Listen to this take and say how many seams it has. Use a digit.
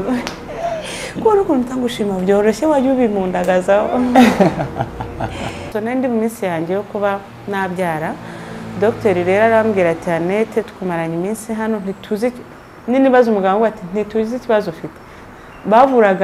1